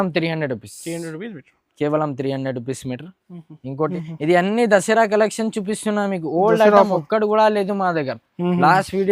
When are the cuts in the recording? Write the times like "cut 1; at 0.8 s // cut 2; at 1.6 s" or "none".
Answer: cut 1; at 3.9 s